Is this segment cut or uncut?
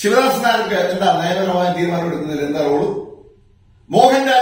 uncut